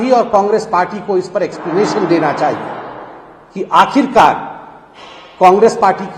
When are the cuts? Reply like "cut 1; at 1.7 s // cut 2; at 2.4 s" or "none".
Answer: none